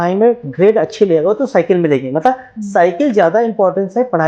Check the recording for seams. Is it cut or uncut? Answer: uncut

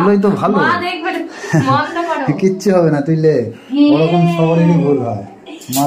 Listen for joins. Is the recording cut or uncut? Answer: uncut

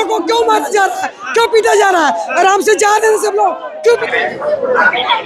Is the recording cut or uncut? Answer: cut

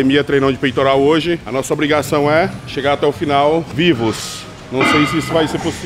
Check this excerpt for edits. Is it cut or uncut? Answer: cut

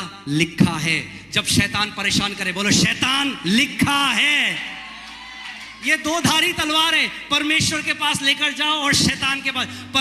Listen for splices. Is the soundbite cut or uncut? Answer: uncut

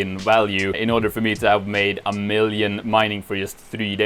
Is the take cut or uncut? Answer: cut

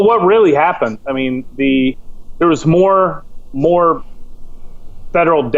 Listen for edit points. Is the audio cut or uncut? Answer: uncut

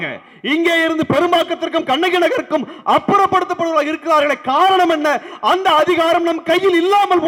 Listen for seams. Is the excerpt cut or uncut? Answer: uncut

